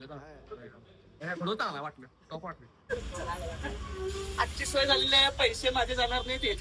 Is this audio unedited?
no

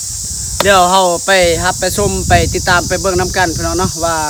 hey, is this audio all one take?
yes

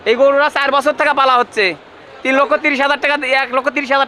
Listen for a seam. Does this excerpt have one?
no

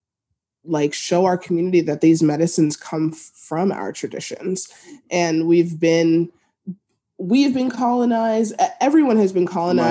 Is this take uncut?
yes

